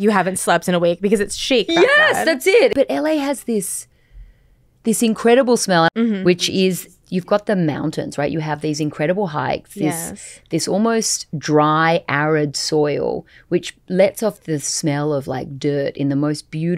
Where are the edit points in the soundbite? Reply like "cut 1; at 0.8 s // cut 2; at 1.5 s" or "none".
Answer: cut 1; at 2.7 s // cut 2; at 5.9 s // cut 3; at 7.0 s